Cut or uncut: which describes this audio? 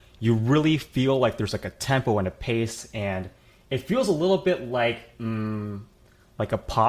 uncut